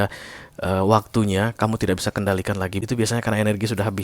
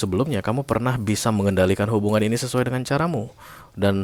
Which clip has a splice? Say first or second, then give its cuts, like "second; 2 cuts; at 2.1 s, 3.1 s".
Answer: first; 1 cut; at 2.8 s